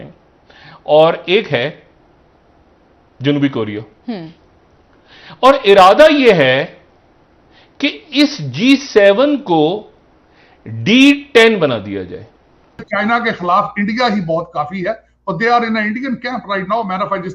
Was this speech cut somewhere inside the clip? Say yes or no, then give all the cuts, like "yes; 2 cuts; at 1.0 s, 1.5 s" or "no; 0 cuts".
yes; 1 cut; at 12.9 s